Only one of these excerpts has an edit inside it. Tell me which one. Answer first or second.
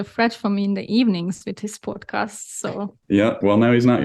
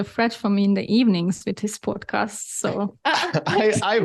second